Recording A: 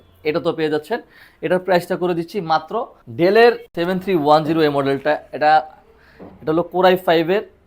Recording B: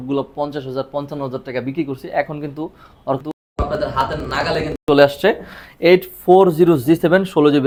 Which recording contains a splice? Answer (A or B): A